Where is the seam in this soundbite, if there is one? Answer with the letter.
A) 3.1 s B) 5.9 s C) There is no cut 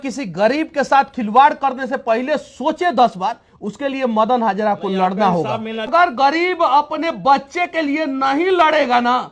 B